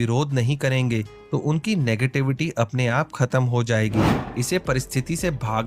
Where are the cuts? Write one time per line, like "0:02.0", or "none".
0:04.2